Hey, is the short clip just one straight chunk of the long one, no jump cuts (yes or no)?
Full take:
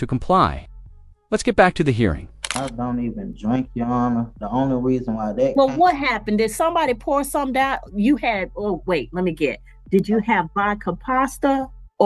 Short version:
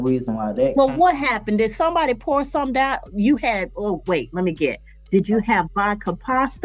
yes